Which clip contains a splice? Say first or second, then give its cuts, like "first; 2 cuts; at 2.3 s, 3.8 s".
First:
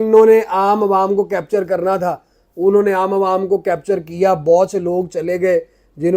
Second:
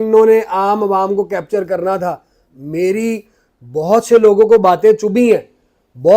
second; 1 cut; at 2.4 s